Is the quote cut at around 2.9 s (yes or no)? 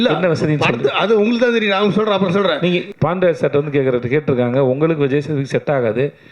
yes